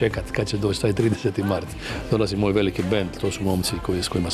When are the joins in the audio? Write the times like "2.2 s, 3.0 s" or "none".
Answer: none